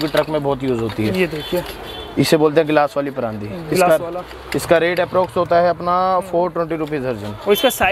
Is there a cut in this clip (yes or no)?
no